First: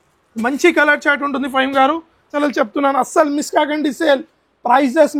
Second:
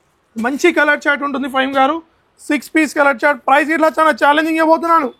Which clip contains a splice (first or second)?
first